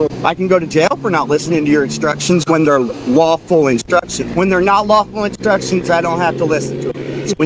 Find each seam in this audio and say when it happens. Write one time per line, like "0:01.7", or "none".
0:04.2